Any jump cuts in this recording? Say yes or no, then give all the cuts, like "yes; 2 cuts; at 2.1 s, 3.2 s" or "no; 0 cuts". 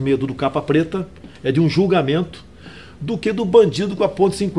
no; 0 cuts